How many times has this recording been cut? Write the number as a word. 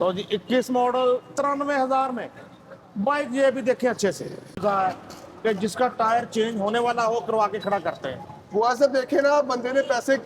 one